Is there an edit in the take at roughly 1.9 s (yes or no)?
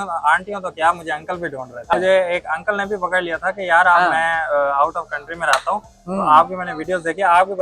yes